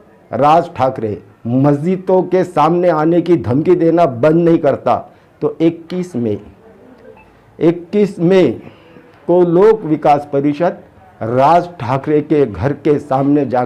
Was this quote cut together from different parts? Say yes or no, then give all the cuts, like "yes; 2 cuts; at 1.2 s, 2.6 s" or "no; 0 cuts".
no; 0 cuts